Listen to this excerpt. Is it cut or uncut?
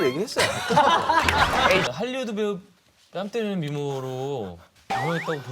cut